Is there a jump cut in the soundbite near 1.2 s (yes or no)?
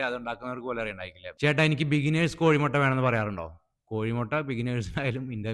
yes